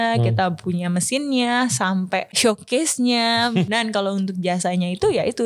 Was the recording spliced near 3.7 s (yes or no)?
yes